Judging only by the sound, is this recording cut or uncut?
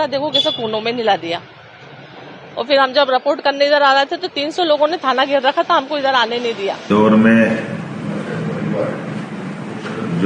cut